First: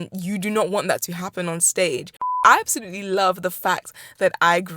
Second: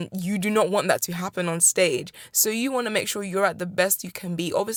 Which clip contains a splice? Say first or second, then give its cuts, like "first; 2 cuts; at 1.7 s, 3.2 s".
first; 1 cut; at 2.3 s